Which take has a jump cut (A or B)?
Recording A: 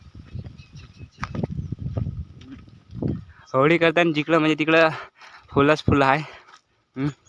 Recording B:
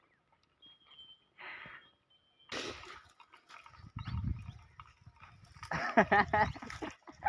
B